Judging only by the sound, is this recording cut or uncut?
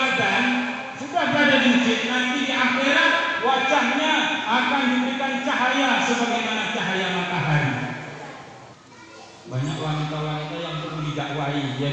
cut